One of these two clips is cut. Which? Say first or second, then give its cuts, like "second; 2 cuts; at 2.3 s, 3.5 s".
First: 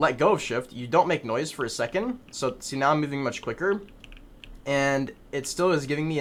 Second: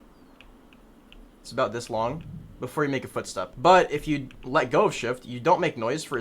second; 1 cut; at 3.5 s